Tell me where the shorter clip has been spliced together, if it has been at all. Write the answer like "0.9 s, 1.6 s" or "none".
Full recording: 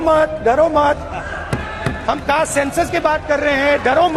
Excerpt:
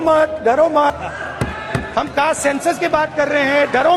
0.9 s